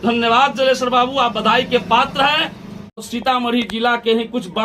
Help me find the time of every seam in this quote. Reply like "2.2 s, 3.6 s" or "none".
3.0 s